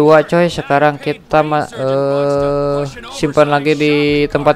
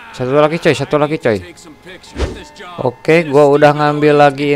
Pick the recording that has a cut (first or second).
second